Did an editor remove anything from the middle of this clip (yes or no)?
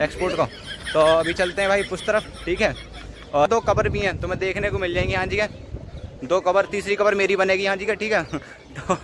yes